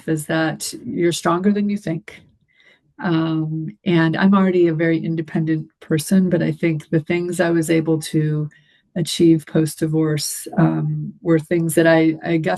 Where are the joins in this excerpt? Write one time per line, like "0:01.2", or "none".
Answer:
none